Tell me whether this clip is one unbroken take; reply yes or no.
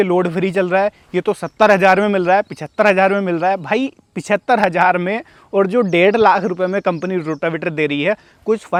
yes